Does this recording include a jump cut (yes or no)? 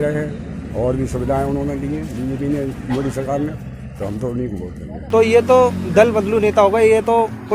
yes